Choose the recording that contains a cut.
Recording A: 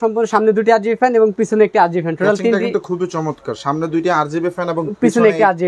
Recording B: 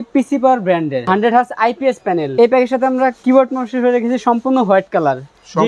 B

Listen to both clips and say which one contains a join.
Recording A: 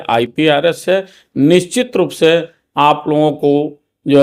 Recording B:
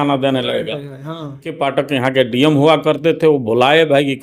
B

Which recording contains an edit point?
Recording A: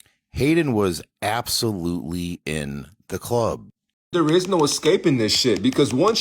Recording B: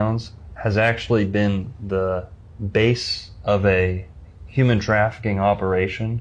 A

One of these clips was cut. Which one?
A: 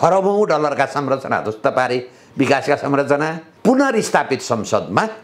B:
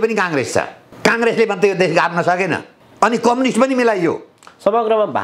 A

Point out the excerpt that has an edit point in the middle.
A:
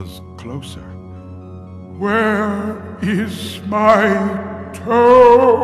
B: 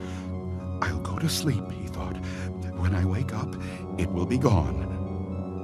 A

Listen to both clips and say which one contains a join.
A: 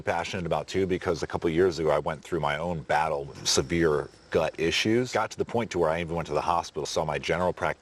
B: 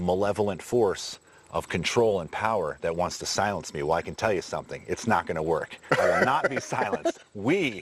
A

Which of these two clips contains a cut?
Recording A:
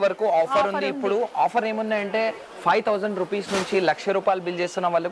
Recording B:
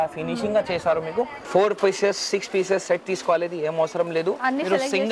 B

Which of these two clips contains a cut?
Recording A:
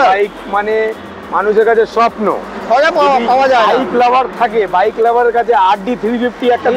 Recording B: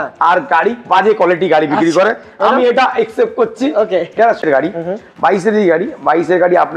B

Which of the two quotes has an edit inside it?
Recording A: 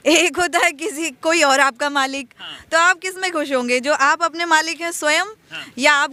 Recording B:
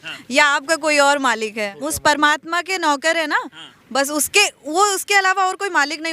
B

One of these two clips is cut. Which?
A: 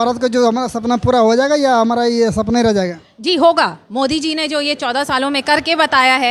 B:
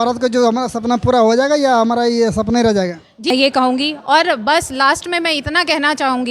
B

